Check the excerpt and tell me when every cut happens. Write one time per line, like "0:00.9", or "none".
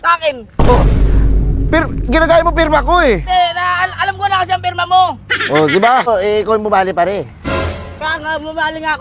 0:06.1